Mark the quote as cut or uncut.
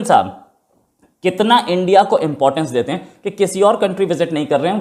uncut